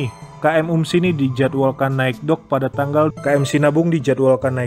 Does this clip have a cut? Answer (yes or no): yes